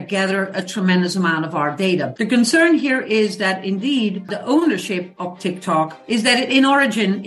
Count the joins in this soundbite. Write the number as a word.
three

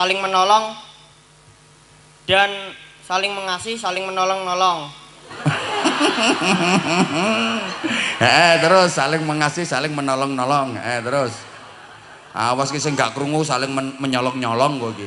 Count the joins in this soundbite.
zero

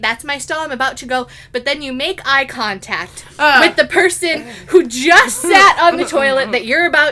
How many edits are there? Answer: zero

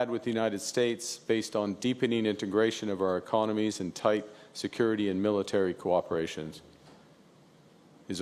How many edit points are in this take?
zero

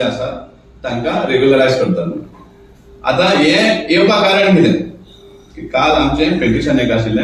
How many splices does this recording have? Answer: zero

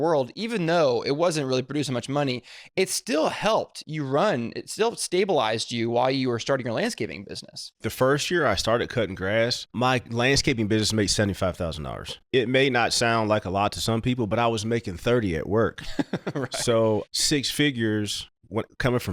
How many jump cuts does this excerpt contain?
four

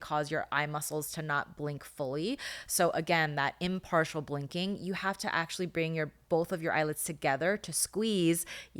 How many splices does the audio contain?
zero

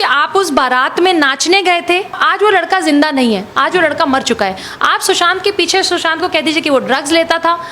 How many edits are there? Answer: one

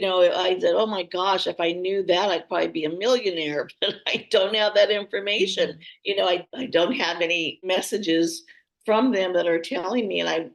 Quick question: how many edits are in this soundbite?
two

